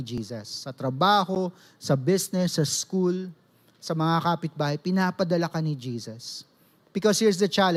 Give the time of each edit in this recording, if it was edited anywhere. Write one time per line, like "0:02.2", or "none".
none